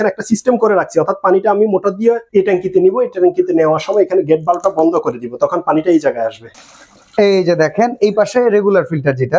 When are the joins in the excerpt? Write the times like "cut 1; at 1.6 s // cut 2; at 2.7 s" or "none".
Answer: cut 1; at 2.2 s // cut 2; at 6.5 s